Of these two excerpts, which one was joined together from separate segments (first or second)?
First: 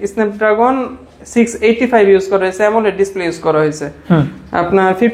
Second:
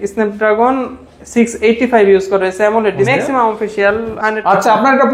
second